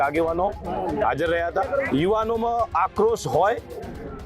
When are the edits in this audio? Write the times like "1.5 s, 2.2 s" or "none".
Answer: 1.9 s

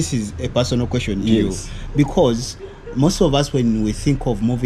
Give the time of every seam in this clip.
none

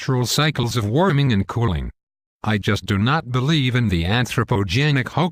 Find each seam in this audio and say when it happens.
none

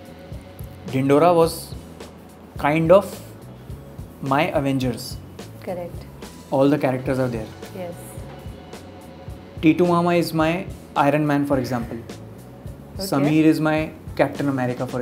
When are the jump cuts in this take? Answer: none

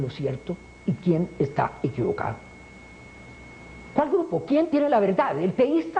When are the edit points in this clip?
none

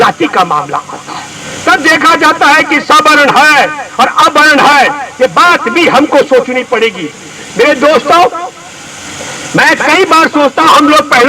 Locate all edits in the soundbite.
none

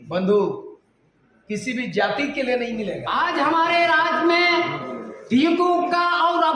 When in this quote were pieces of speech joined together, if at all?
3.0 s

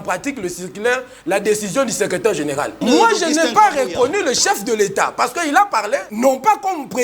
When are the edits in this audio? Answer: 2.7 s, 6.1 s

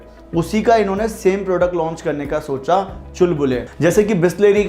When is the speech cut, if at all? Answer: 3.7 s

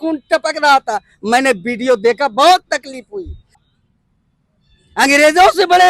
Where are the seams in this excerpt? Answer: 3.5 s

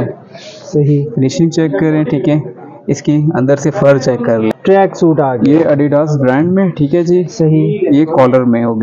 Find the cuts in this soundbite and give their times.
4.5 s

